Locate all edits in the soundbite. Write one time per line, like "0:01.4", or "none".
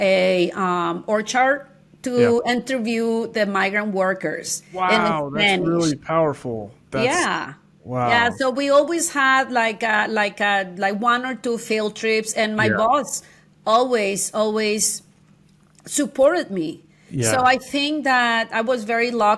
none